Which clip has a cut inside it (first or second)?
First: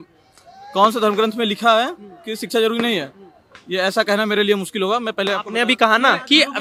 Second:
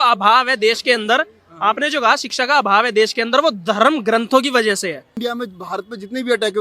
second